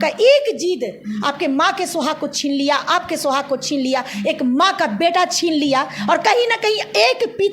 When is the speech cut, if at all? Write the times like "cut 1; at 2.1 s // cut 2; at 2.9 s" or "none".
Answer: none